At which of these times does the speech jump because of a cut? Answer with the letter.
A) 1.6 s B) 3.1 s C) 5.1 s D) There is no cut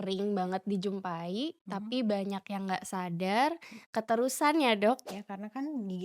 C